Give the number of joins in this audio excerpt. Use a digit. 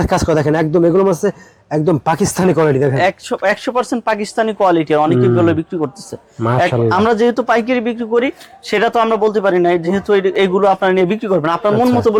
0